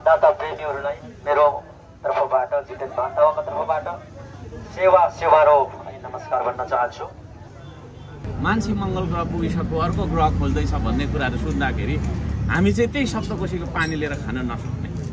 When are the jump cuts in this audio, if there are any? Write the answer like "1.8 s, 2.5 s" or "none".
8.2 s